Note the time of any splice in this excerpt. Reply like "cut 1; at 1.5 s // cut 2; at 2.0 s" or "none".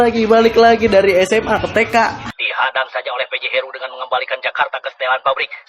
cut 1; at 2.3 s